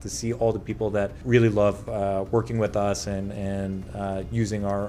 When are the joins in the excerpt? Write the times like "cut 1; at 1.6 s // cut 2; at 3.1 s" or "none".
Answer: cut 1; at 1.2 s